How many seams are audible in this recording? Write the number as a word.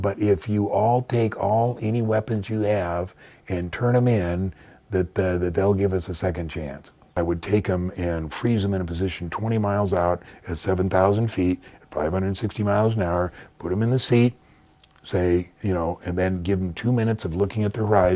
one